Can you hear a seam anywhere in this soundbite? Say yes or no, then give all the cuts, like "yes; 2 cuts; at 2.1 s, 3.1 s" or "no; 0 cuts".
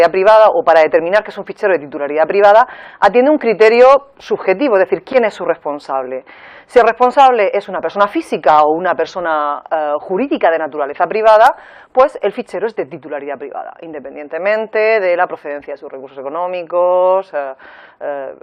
yes; 1 cut; at 1.1 s